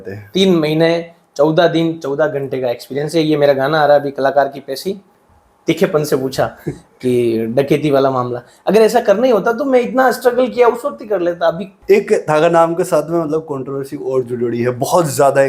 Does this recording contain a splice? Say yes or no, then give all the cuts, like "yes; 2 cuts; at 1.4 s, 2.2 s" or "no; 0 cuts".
yes; 2 cuts; at 5.1 s, 11.7 s